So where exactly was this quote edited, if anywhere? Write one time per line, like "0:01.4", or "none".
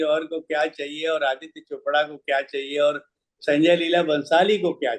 none